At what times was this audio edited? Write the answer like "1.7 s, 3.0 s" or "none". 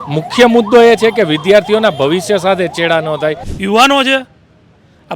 3.5 s